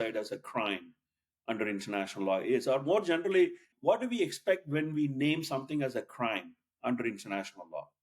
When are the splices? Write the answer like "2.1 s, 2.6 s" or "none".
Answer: 3.7 s